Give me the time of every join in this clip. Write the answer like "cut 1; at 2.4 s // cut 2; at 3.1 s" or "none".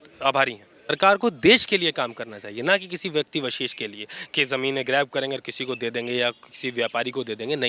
cut 1; at 0.9 s

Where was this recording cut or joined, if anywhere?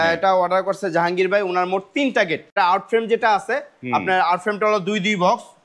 cut 1; at 2.5 s

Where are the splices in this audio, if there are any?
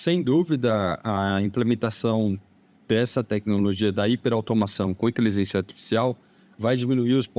none

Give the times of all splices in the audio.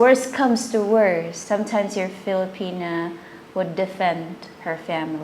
cut 1; at 1.4 s

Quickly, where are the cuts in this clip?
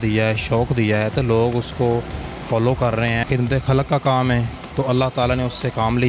cut 1; at 3.2 s

